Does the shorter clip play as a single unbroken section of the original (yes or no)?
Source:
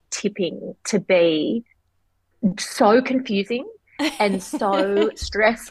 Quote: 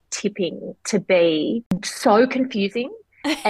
no